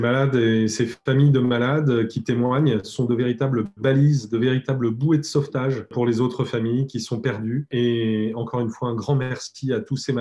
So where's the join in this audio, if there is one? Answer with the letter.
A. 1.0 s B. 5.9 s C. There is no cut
B